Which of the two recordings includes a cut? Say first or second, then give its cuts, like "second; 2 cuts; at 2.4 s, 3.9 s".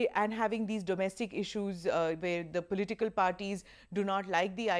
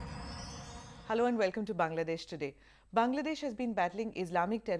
second; 2 cuts; at 0.9 s, 3.9 s